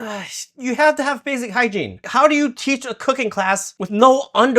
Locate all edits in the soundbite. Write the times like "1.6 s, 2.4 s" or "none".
2.0 s, 3.7 s